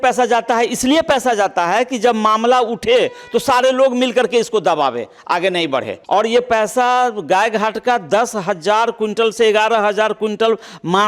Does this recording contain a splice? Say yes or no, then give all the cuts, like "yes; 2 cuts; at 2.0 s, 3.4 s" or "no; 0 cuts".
yes; 1 cut; at 5.9 s